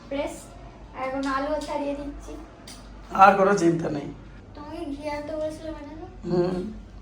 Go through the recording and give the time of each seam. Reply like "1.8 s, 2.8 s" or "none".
none